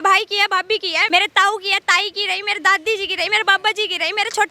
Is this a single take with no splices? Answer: no; 1 cut; at 1.0 s

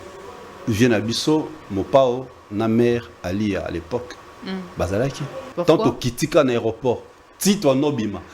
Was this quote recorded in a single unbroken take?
no; 1 cut; at 5.5 s

